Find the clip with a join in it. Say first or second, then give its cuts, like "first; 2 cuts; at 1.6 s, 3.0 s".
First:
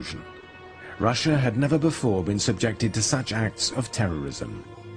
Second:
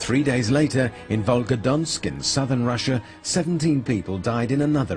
first; 1 cut; at 1.1 s